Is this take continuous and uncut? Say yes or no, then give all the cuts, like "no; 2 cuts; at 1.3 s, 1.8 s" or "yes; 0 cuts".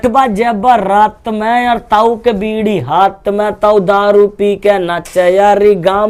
yes; 0 cuts